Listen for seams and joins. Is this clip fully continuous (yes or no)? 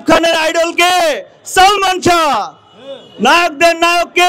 yes